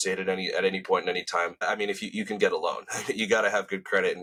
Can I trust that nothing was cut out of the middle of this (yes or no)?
yes